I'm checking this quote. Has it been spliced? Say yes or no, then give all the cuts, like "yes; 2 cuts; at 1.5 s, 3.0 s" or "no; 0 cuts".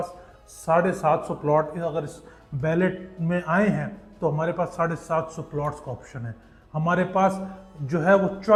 no; 0 cuts